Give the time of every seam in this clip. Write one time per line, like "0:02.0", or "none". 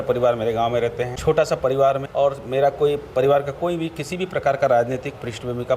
0:01.1
0:02.0